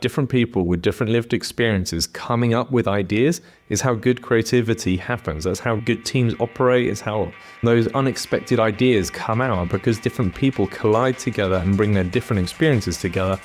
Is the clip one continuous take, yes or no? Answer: no